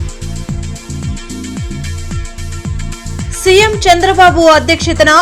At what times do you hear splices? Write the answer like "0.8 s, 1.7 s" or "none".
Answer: 1.0 s